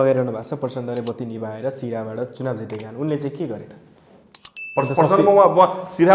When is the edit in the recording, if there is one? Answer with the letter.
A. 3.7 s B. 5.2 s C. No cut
C